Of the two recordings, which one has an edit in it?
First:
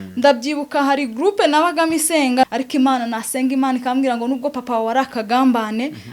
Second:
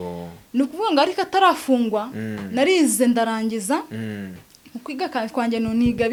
first; 1 cut; at 2.4 s

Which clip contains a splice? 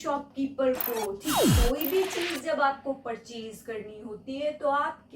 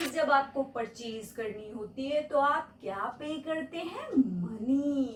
first; 1 cut; at 1.4 s

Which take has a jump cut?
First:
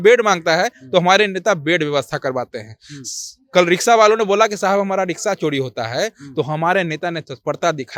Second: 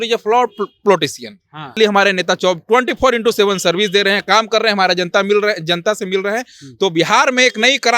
second; 1 cut; at 1.8 s

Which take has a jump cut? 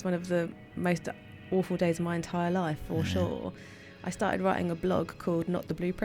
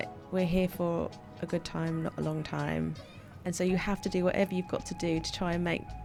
first; 1 cut; at 3.8 s

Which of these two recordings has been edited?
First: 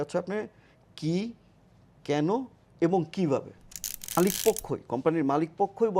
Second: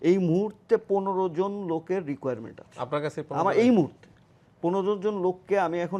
first; 1 cut; at 4.2 s

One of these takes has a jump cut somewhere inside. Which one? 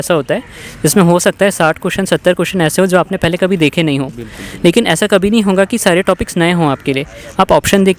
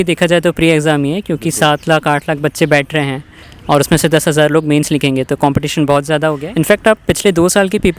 second; 1 cut; at 6.4 s

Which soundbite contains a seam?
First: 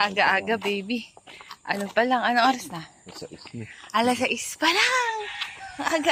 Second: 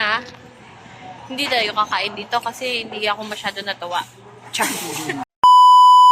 second; 1 cut; at 5.2 s

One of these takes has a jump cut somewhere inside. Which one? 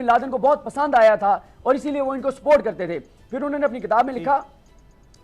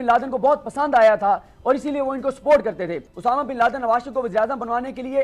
second; 1 cut; at 3.1 s

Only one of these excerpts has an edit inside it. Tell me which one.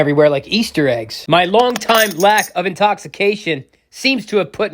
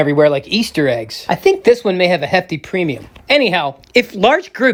first; 1 cut; at 1.2 s

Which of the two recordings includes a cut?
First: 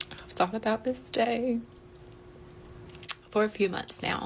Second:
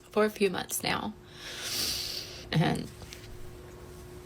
second; 1 cut; at 2.5 s

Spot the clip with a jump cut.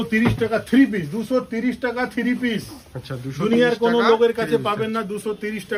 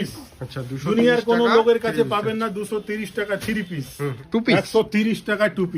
second; 1 cut; at 4.2 s

